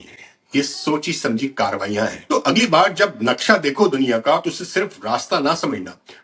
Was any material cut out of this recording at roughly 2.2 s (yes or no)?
yes